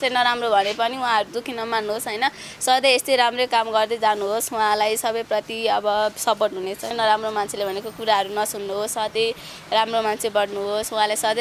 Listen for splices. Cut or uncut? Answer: cut